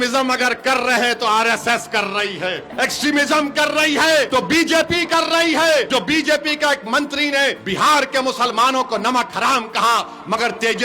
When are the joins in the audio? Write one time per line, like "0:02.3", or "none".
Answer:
0:02.7
0:04.3
0:05.9
0:07.6